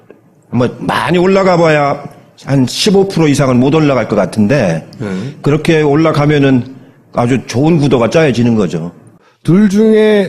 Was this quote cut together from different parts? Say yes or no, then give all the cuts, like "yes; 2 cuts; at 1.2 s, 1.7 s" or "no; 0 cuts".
no; 0 cuts